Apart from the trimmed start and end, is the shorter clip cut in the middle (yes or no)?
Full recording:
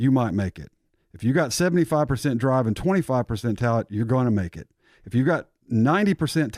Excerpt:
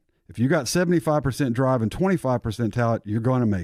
no